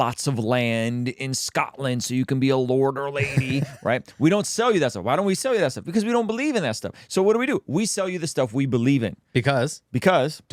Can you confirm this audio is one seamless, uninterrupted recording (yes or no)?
yes